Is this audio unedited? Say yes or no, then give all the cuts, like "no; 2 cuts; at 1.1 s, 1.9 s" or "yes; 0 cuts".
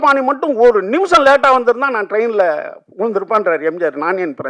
yes; 0 cuts